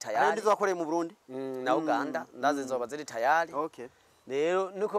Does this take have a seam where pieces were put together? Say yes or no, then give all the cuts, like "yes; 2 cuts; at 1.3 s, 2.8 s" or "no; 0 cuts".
no; 0 cuts